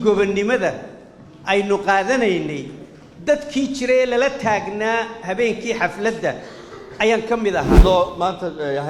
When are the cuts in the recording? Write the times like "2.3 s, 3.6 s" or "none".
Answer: 7.8 s